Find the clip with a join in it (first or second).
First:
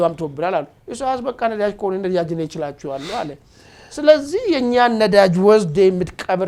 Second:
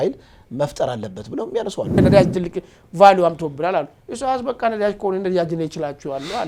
second